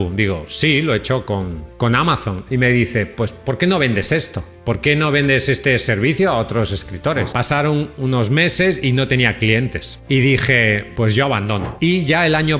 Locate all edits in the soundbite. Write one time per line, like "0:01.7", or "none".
0:07.3
0:11.7